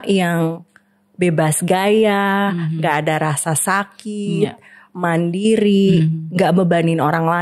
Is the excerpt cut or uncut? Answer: uncut